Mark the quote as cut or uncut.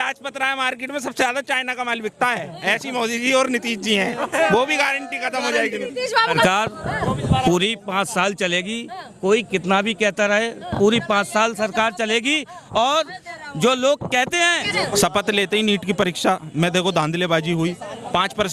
cut